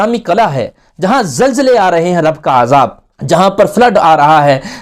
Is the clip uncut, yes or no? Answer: yes